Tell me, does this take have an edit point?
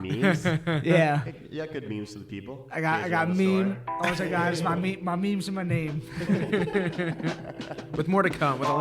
no; 0 cuts

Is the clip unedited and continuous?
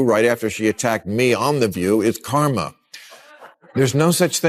yes; 0 cuts

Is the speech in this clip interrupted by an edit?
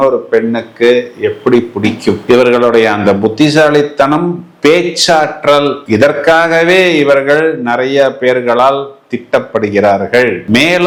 no; 0 cuts

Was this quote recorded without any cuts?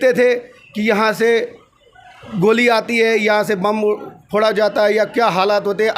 yes; 0 cuts

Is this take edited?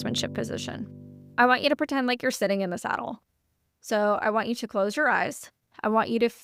no; 0 cuts

